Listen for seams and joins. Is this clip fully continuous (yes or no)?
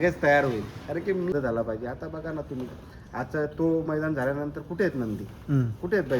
no